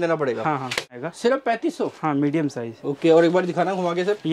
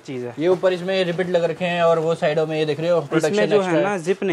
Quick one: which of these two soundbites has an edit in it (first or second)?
first